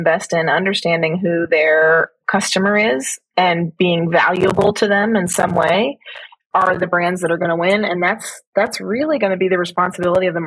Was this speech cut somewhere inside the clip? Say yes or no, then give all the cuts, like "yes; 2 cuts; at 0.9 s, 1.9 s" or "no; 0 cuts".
no; 0 cuts